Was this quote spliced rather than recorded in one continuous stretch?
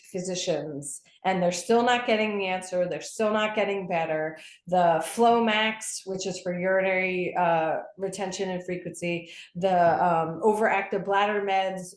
no; 0 cuts

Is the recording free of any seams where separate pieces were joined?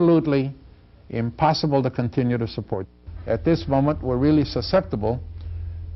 no; 1 cut; at 2.8 s

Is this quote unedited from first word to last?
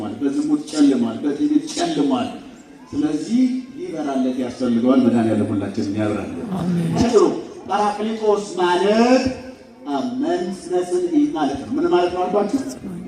no; 1 cut; at 7.0 s

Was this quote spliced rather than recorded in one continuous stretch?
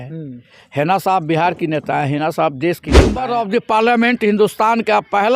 yes; 1 cut; at 3.3 s

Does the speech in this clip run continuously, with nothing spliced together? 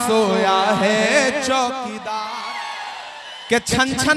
no; 1 cut; at 2.3 s

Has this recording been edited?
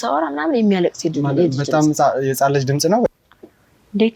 yes; 1 cut; at 3.1 s

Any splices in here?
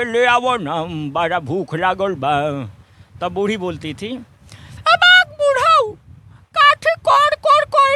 no; 0 cuts

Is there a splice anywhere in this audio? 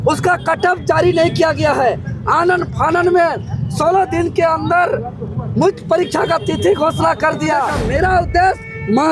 yes; 1 cut; at 7.8 s

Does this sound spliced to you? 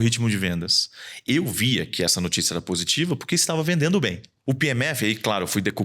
yes; 1 cut; at 4.3 s

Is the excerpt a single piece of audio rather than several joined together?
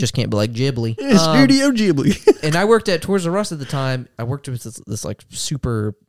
no; 2 cuts; at 1.1 s, 4.1 s

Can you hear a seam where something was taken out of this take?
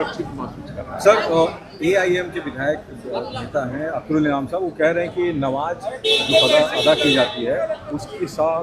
no; 0 cuts

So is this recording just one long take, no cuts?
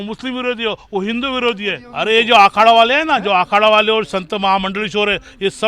no; 1 cut; at 1.8 s

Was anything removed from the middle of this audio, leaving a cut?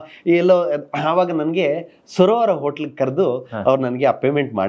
no; 0 cuts

